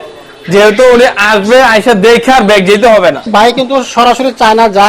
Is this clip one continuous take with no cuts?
no; 1 cut; at 3.3 s

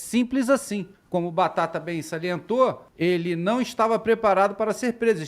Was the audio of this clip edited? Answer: yes; 2 cuts; at 1.0 s, 2.9 s

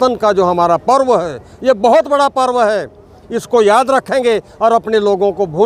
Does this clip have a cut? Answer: no; 0 cuts

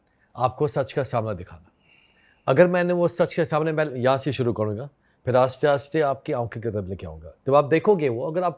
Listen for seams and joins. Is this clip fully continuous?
yes; 0 cuts

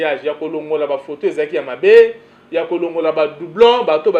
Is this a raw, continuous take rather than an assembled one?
yes; 0 cuts

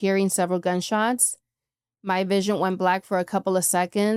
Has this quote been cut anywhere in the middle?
no; 0 cuts

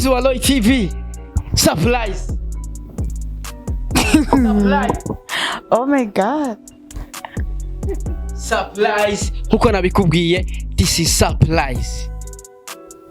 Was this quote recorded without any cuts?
yes; 0 cuts

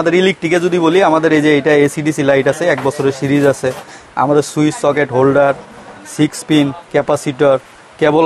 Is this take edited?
no; 0 cuts

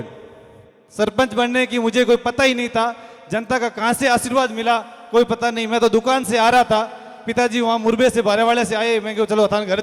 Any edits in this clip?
no; 0 cuts

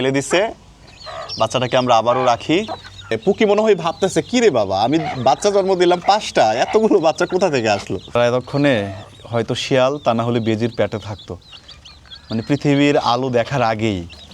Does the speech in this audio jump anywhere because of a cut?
yes; 2 cuts; at 3.2 s, 8.2 s

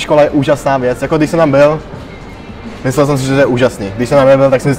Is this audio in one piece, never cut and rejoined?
yes; 0 cuts

